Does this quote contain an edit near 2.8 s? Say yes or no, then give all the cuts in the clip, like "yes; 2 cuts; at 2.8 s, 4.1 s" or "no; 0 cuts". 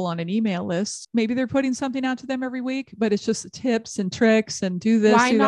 no; 1 cut; at 1.0 s